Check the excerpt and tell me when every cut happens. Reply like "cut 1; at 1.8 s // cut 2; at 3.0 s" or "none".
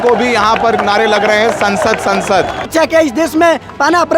cut 1; at 2.6 s